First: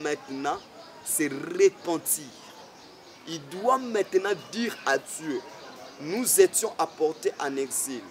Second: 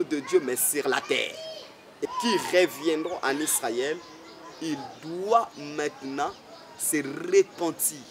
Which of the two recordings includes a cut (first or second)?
second